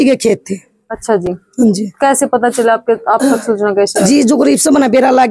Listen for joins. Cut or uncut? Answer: uncut